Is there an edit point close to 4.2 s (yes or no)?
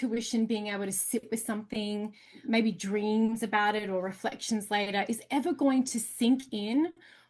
no